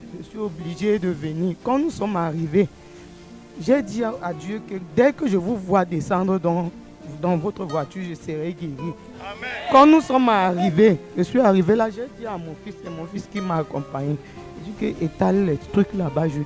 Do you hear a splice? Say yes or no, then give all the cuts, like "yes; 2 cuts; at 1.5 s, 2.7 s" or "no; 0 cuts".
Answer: no; 0 cuts